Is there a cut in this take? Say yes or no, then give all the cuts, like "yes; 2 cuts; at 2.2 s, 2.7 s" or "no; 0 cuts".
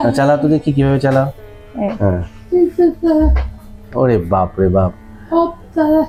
no; 0 cuts